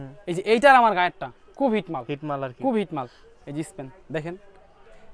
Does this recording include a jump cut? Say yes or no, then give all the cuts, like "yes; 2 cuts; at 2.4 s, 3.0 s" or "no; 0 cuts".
no; 0 cuts